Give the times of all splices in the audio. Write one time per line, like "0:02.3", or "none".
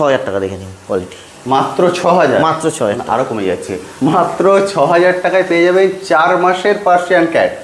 none